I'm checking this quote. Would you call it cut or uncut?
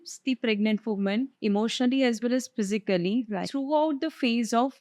cut